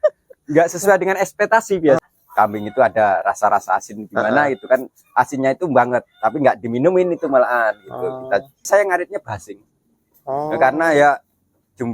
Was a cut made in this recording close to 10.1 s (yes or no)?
no